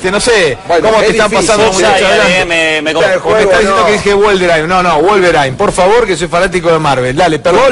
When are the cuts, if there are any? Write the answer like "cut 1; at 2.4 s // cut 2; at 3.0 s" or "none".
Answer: cut 1; at 4.3 s